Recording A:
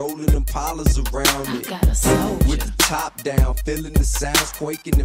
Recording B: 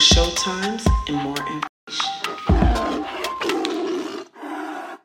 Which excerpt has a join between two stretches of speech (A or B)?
B